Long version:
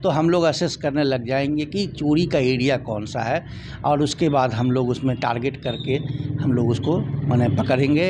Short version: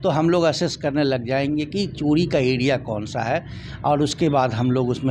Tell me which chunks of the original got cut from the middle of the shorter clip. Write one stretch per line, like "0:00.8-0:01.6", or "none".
none